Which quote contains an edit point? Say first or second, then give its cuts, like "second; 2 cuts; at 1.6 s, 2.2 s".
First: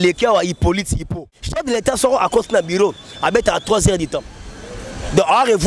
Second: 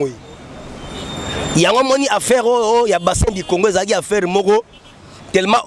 first; 1 cut; at 1.1 s